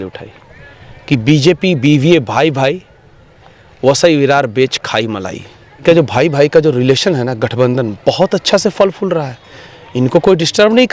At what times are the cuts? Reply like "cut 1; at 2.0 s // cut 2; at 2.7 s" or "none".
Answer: cut 1; at 5.8 s